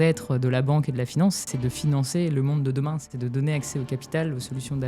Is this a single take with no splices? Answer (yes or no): no